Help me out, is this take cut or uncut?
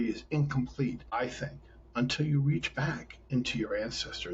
cut